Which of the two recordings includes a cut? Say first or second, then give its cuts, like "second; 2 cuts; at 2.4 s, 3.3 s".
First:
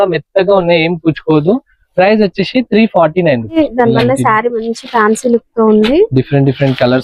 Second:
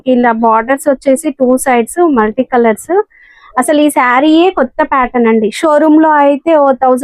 first; 1 cut; at 3.6 s